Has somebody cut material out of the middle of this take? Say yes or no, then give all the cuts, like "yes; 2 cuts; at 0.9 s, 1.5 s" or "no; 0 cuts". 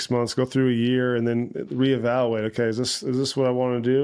no; 0 cuts